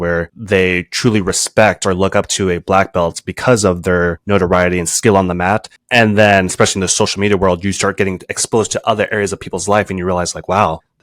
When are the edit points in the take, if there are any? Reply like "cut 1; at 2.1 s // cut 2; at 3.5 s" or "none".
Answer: cut 1; at 4.2 s